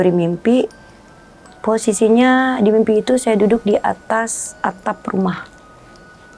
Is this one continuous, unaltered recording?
yes; 0 cuts

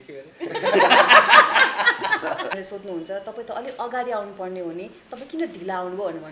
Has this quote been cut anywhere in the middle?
yes; 1 cut; at 2.5 s

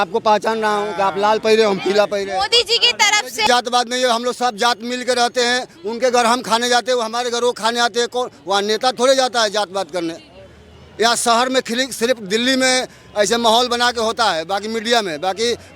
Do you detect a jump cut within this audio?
yes; 1 cut; at 3.5 s

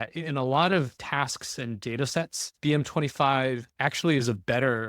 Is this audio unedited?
no; 3 cuts; at 1.0 s, 2.4 s, 3.7 s

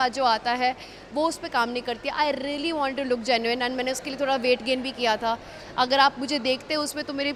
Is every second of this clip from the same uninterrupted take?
yes; 0 cuts

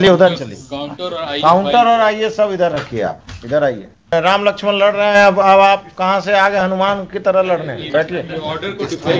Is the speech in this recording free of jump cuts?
no; 1 cut; at 4.1 s

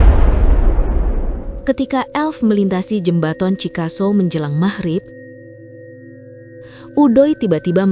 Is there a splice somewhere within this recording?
no; 0 cuts

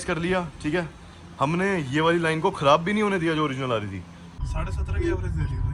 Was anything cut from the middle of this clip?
yes; 1 cut; at 4.4 s

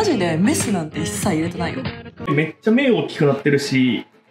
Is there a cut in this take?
yes; 1 cut; at 2.1 s

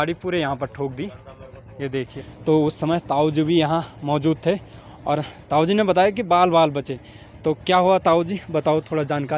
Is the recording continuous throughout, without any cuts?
no; 1 cut; at 2.1 s

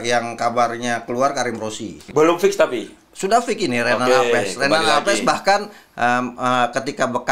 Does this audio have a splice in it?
yes; 1 cut; at 1.9 s

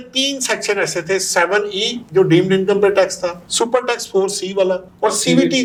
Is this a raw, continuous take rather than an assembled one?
yes; 0 cuts

